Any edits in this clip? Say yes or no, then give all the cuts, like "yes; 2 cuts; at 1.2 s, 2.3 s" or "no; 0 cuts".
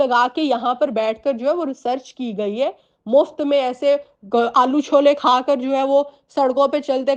no; 0 cuts